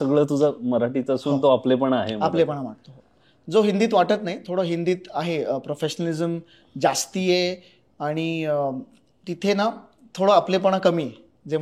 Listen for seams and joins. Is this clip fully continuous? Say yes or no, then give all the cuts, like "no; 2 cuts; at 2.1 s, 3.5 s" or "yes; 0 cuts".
yes; 0 cuts